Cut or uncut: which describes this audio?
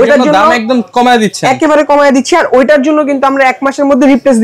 uncut